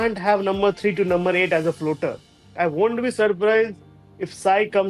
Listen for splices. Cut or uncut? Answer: uncut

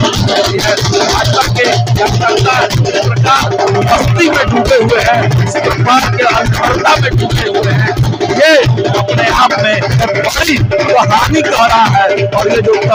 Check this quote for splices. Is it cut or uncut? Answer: uncut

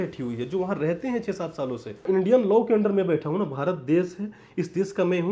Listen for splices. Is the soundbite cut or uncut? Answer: cut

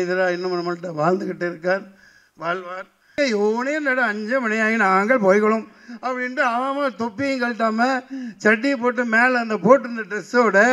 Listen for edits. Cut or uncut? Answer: cut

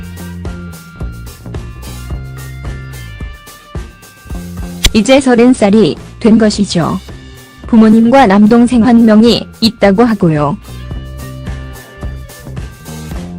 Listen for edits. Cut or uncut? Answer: uncut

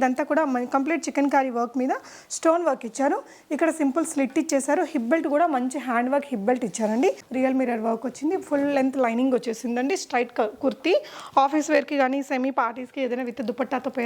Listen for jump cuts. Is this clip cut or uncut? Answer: cut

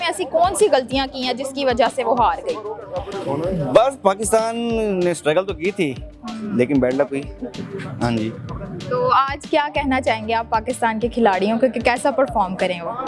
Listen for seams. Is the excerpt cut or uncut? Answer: uncut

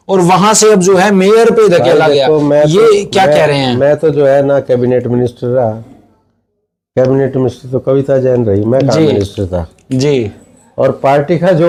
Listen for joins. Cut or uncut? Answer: uncut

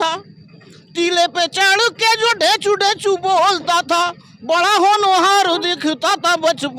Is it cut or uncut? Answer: uncut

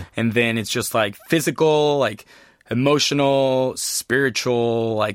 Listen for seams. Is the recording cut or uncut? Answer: cut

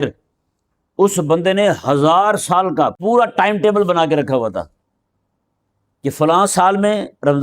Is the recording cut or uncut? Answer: cut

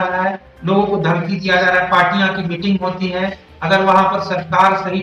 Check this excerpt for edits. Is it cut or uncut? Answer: uncut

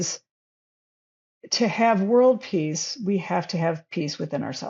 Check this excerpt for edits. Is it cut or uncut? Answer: uncut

